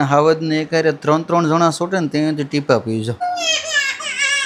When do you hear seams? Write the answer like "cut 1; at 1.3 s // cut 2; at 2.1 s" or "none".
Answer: cut 1; at 3.2 s